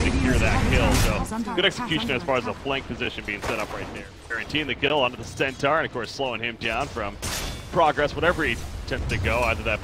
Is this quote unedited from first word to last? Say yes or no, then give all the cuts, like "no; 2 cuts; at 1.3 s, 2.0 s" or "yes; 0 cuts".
no; 1 cut; at 1.5 s